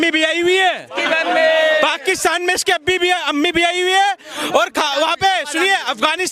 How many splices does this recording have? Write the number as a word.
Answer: zero